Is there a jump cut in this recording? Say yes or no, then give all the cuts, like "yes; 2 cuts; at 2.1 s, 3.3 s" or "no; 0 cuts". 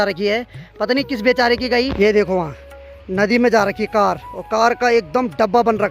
yes; 1 cut; at 1.9 s